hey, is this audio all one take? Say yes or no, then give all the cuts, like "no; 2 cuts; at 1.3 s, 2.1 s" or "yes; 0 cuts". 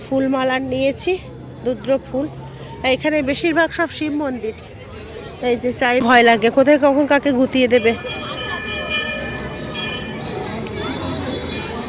no; 1 cut; at 6.0 s